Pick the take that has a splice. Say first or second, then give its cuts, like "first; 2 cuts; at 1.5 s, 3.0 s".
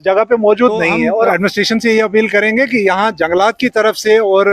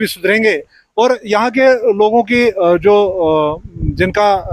first; 1 cut; at 1.3 s